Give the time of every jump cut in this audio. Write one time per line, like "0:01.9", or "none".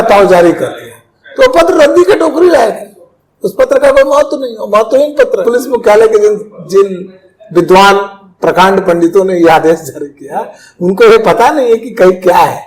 0:05.4